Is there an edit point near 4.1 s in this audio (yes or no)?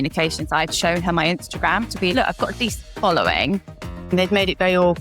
yes